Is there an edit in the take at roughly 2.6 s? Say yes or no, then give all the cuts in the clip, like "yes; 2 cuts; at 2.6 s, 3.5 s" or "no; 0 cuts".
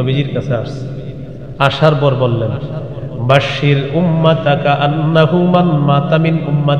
no; 0 cuts